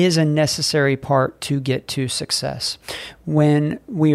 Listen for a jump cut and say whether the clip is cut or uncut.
uncut